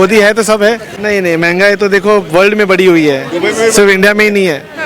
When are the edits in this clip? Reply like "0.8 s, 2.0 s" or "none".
1.0 s

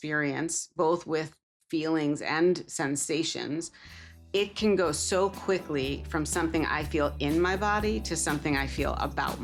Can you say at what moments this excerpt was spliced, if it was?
none

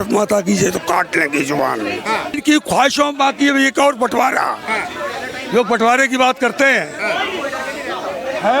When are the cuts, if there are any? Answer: 2.4 s

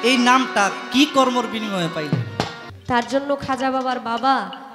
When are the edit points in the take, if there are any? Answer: 2.7 s

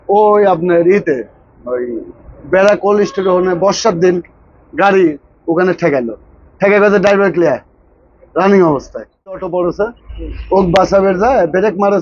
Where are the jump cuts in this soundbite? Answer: 9.4 s

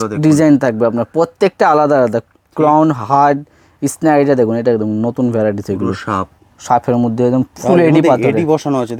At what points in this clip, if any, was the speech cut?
none

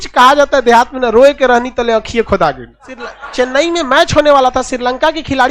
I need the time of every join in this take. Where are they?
3.2 s

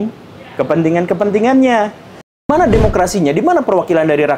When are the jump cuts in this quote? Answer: 2.5 s

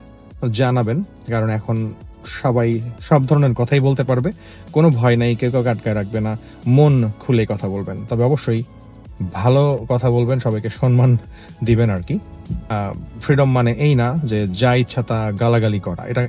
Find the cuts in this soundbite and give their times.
none

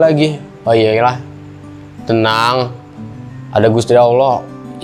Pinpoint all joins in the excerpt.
none

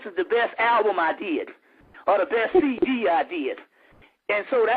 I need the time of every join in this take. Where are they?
3.0 s

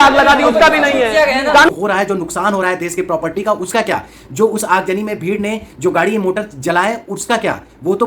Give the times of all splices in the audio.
1.7 s

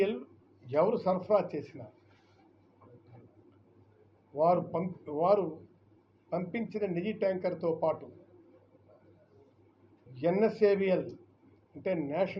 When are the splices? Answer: 10.1 s

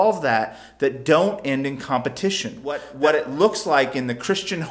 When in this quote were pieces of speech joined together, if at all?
2.9 s

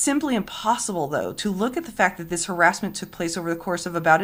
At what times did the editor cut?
none

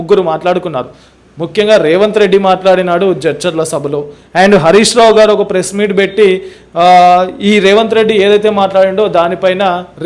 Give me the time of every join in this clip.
none

